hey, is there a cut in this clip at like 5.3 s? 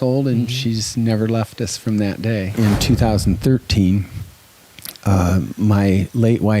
no; 1 cut; at 2.5 s

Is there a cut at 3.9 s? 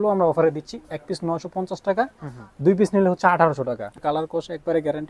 yes; 1 cut; at 3.9 s

